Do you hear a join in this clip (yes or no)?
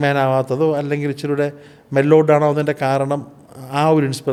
no